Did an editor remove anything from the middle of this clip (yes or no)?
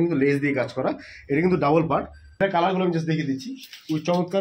yes